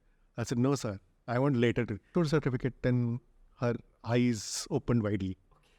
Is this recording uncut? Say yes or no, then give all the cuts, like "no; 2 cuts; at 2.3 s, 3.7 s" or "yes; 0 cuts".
no; 1 cut; at 2.1 s